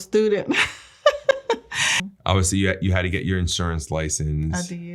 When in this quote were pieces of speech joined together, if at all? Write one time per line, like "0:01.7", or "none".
0:02.0